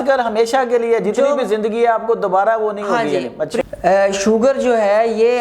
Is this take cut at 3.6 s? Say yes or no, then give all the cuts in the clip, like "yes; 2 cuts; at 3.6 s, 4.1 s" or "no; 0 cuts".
yes; 1 cut; at 3.6 s